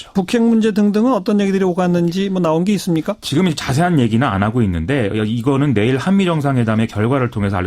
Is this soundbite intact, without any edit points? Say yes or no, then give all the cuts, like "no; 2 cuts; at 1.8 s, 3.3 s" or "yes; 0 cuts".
no; 1 cut; at 5.4 s